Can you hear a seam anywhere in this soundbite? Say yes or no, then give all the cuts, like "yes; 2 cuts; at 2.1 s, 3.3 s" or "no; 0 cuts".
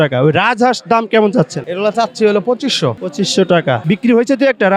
yes; 3 cuts; at 1.6 s, 3.0 s, 3.8 s